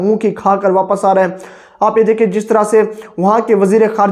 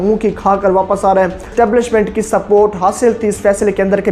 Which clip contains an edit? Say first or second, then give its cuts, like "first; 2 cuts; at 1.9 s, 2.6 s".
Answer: second; 1 cut; at 1.5 s